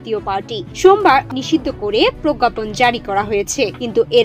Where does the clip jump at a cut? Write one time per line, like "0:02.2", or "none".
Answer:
0:01.3